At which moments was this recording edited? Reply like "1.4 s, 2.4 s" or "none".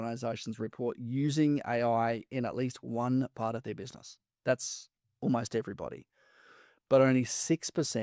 none